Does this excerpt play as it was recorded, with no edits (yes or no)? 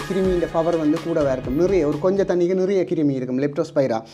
yes